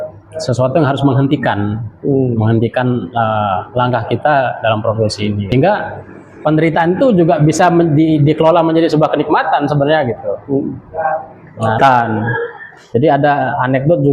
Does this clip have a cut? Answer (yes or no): yes